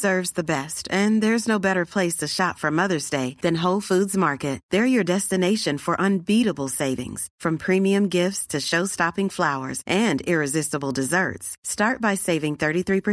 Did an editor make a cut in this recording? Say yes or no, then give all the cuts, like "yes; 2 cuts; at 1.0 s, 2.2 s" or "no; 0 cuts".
no; 0 cuts